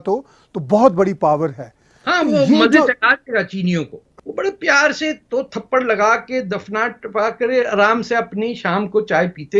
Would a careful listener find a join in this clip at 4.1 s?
yes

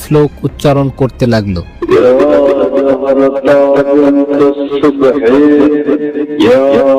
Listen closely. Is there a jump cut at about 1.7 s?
yes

